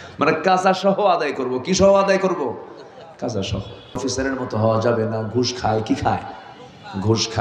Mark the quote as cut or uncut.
cut